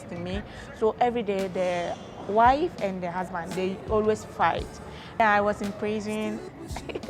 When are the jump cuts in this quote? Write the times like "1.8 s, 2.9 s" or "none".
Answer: 5.2 s